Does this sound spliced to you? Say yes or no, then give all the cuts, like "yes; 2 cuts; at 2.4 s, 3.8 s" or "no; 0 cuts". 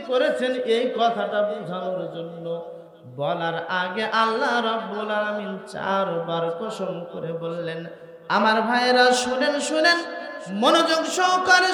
no; 0 cuts